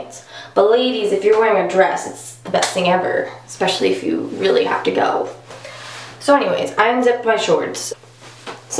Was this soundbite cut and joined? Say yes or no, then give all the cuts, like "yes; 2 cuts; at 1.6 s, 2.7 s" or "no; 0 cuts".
yes; 1 cut; at 7.8 s